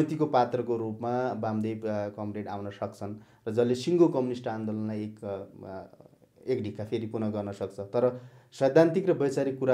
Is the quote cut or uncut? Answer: uncut